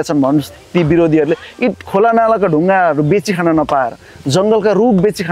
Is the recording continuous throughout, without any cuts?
yes; 0 cuts

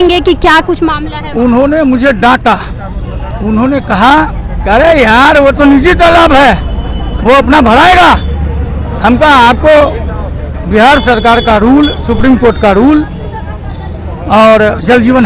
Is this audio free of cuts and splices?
yes; 0 cuts

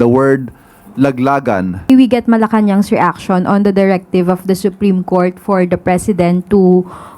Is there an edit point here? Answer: yes; 1 cut; at 1.9 s

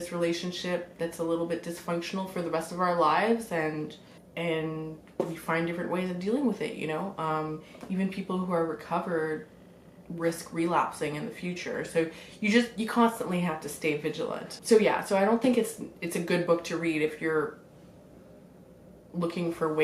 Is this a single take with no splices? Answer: yes; 0 cuts

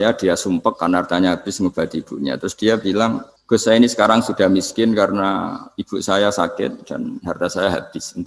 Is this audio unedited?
no; 1 cut; at 3.3 s

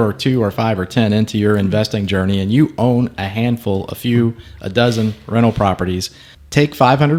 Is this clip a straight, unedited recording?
yes; 0 cuts

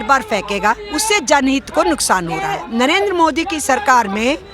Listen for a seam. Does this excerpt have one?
yes; 1 cut; at 2.6 s

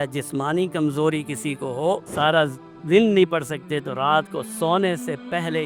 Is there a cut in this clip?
yes; 1 cut; at 2.1 s

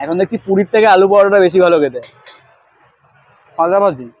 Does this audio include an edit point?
no; 0 cuts

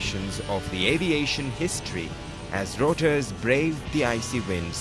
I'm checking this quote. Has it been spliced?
no; 0 cuts

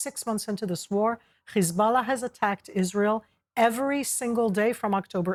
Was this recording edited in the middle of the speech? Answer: no; 0 cuts

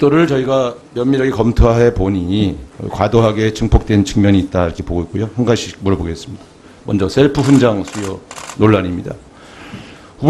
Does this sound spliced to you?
no; 0 cuts

